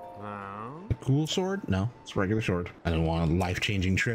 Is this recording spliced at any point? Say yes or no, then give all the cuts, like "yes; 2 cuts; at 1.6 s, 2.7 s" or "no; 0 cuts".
yes; 1 cut; at 2.7 s